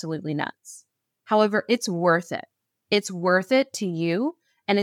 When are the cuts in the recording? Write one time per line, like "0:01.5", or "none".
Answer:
none